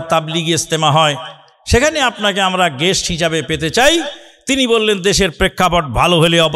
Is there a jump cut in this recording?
no; 0 cuts

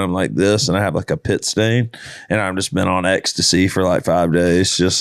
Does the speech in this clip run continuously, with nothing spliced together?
yes; 0 cuts

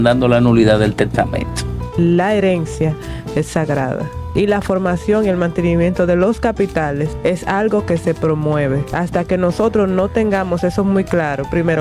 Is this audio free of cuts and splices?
no; 4 cuts; at 1.8 s, 4.2 s, 7.1 s, 8.9 s

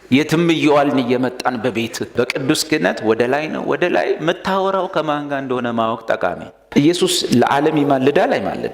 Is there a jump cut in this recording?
yes; 2 cuts; at 2.0 s, 6.5 s

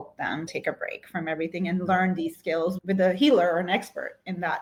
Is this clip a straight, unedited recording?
yes; 0 cuts

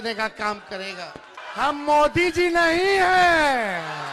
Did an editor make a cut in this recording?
yes; 1 cut; at 1.4 s

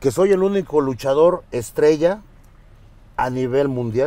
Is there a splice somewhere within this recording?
no; 0 cuts

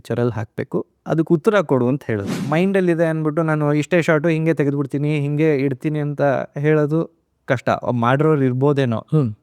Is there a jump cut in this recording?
yes; 1 cut; at 2.4 s

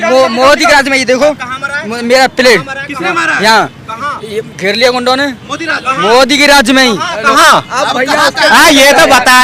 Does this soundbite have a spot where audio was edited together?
no; 0 cuts

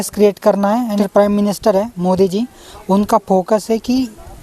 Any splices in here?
yes; 1 cut; at 1.0 s

